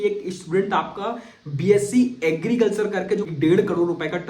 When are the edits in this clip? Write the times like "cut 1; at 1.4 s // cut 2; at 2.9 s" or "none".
cut 1; at 3.3 s